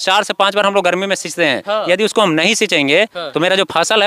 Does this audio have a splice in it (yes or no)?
no